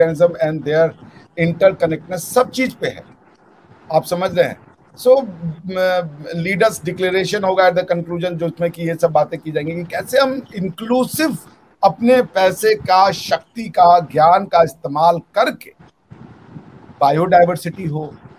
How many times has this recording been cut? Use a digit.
0